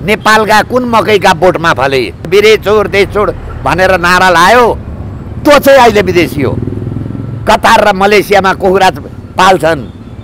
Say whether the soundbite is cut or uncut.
cut